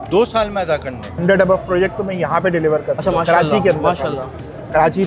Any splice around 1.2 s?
yes; 1 cut; at 1.2 s

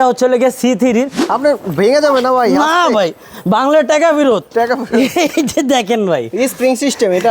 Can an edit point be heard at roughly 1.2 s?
yes; 1 cut; at 1.2 s

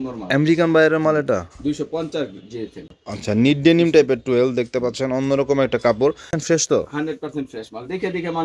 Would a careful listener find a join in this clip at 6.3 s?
yes; 2 cuts; at 3.0 s, 6.3 s

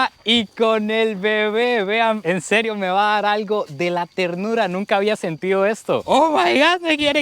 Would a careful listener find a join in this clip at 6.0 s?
yes; 1 cut; at 6.0 s

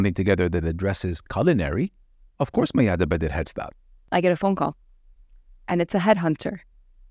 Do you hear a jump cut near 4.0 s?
yes; 1 cut; at 4.0 s

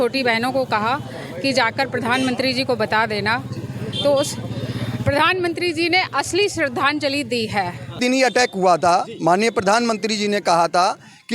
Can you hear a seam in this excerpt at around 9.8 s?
no; 1 cut; at 8.0 s

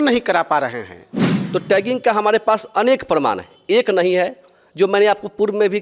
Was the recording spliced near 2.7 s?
no; 1 cut; at 1.4 s

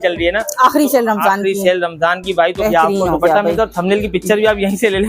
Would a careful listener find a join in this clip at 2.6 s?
yes; 1 cut; at 2.6 s

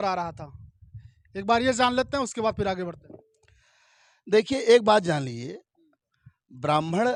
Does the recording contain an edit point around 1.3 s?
no; 0 cuts

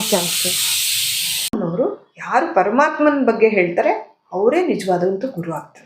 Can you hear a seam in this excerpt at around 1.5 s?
yes; 1 cut; at 1.5 s

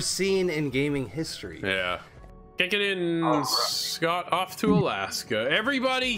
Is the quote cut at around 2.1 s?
yes; 1 cut; at 2.1 s

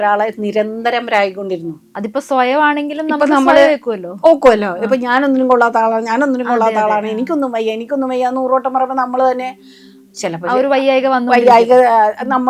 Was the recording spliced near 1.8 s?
yes; 1 cut; at 1.8 s

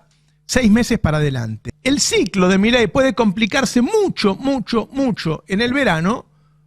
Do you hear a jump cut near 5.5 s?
no; 1 cut; at 1.6 s

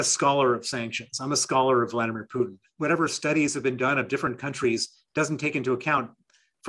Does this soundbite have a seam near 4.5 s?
no; 1 cut; at 2.6 s

